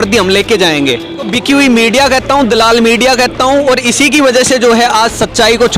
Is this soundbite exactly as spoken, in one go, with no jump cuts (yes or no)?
no